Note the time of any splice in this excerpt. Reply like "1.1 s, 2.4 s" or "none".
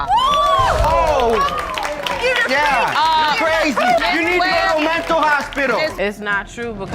5.8 s